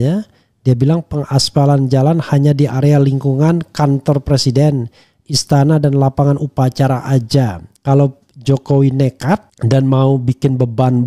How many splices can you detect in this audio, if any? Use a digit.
1